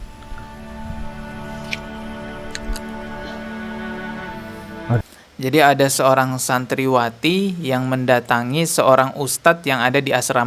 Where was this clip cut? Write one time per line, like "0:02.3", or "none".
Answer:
none